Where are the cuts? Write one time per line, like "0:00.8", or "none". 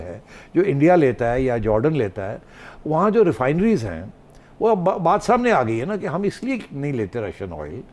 none